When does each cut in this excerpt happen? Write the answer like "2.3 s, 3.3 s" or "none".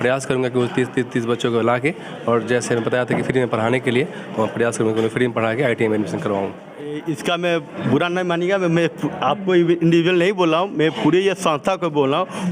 7.0 s